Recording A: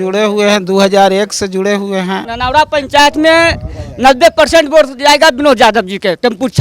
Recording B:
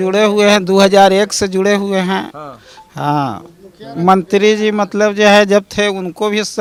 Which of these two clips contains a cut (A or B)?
A